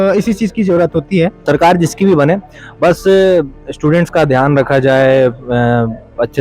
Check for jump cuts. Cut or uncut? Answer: cut